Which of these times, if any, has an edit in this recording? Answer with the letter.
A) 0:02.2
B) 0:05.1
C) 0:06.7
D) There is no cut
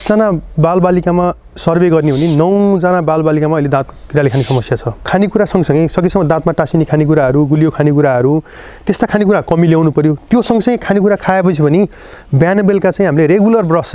B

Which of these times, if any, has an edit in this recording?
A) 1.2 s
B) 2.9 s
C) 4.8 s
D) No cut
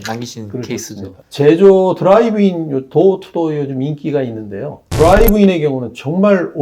A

